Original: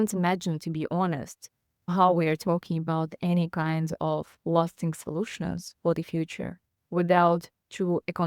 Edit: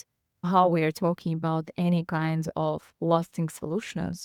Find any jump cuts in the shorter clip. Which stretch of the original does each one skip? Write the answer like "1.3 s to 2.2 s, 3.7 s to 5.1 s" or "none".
none

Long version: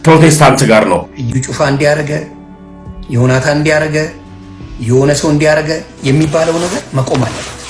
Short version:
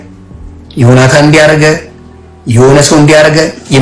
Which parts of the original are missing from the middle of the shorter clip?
none

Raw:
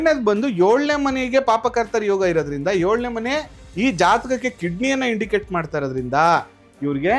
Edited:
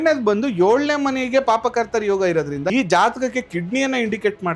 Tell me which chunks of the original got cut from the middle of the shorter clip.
2.7 s to 3.8 s

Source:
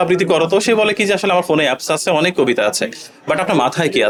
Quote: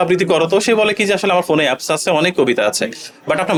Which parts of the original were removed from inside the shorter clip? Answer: none

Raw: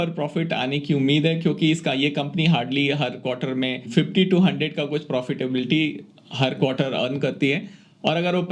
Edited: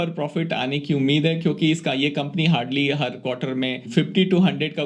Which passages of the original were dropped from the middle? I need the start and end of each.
none

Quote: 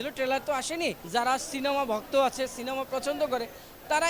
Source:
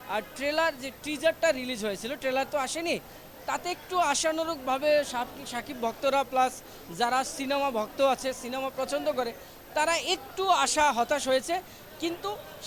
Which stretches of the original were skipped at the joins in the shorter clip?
3.1 s to 6.9 s

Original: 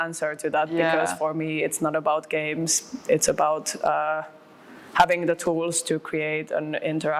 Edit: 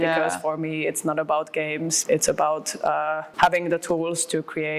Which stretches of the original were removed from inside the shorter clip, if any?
2.7 s to 3.0 s, 4.3 s to 4.8 s

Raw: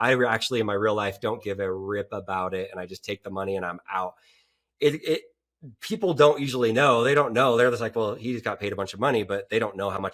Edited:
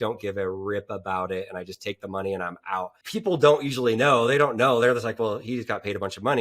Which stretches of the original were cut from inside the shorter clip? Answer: 4.2 s to 5.7 s

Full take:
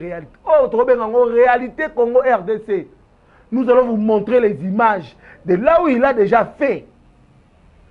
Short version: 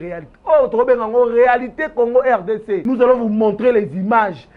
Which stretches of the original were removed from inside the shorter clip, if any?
2.8 s to 3.5 s

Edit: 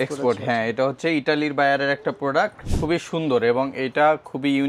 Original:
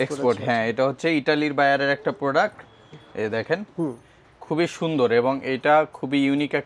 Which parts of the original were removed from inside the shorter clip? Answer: 2.7 s to 4.3 s

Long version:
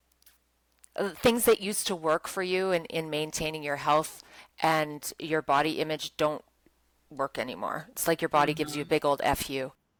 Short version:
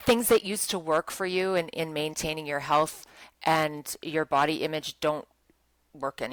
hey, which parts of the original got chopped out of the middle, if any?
none

